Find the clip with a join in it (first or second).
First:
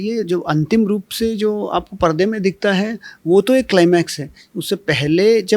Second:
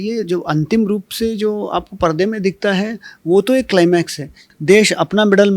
second